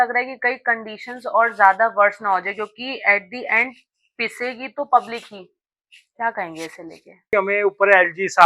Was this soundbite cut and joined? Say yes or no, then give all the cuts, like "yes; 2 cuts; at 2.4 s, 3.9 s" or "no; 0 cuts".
yes; 1 cut; at 7.3 s